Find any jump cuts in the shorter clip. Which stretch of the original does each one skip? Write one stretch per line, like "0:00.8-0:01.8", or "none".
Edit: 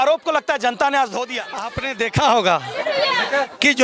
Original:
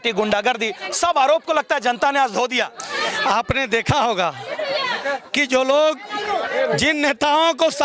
0:03.0-0:03.6